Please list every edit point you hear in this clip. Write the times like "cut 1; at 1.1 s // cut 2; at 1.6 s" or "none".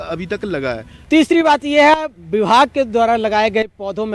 cut 1; at 0.9 s